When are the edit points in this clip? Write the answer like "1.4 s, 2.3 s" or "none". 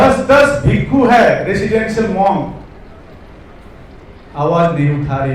none